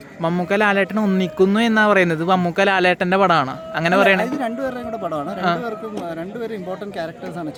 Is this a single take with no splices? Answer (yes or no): yes